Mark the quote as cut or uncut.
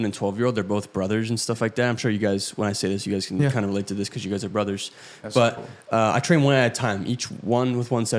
uncut